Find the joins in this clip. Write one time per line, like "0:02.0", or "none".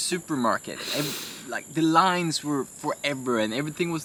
none